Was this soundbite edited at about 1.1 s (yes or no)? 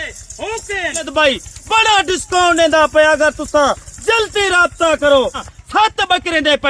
yes